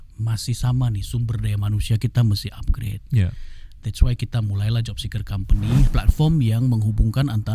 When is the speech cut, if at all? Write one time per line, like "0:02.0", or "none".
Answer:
0:05.9

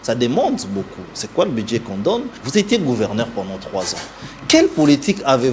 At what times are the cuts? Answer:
0:02.4

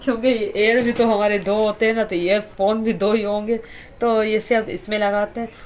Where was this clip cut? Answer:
none

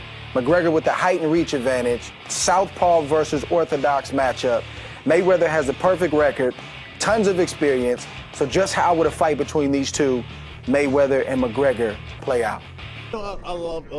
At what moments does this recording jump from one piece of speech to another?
none

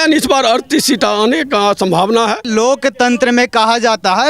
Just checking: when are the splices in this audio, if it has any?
0:02.5

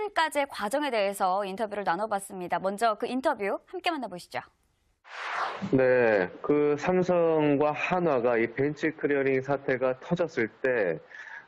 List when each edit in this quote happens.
0:01.3

